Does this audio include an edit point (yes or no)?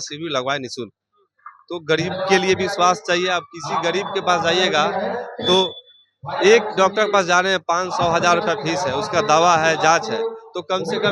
no